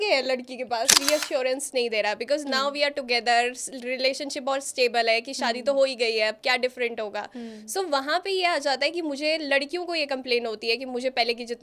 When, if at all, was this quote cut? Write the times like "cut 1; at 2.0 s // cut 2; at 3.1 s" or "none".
cut 1; at 1.0 s